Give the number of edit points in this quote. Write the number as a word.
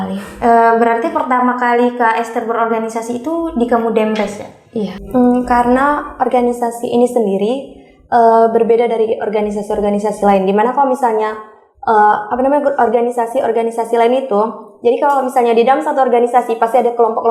one